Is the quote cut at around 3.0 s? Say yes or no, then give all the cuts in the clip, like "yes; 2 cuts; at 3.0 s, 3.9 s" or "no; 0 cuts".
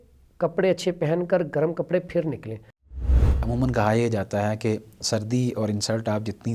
yes; 1 cut; at 3.0 s